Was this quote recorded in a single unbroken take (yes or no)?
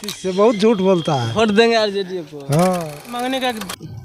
no